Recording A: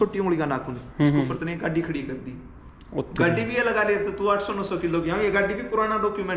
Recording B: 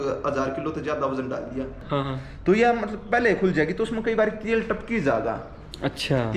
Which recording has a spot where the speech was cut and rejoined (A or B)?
B